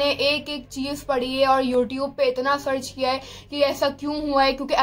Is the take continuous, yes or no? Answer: yes